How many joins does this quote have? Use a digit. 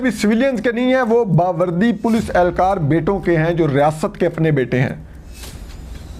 0